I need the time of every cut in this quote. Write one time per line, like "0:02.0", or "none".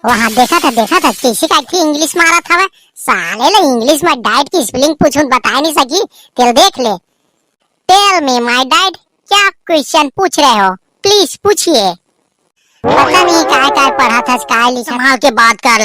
0:14.9